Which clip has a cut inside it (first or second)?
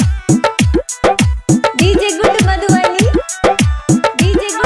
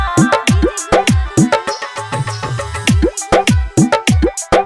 second